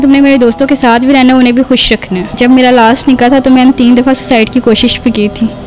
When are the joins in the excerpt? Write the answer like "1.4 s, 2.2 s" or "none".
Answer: 2.3 s